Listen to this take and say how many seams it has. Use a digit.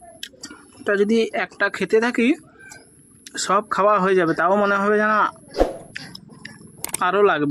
0